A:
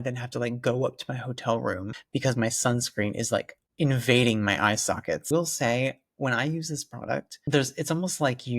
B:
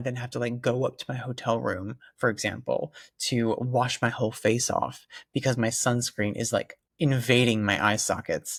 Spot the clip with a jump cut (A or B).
A